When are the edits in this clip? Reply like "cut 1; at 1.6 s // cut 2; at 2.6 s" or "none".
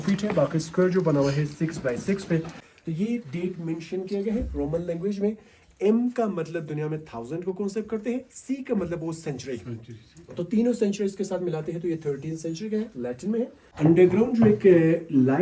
cut 1; at 2.6 s // cut 2; at 13.6 s